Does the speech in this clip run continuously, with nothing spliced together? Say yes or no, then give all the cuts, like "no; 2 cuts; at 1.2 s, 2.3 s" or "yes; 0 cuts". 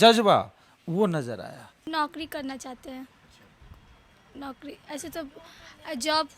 no; 1 cut; at 1.8 s